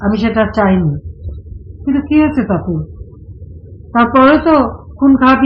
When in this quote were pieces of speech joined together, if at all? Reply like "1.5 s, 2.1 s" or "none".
none